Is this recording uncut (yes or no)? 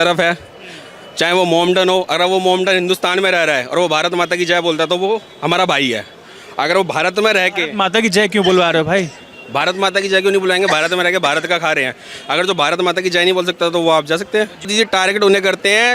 no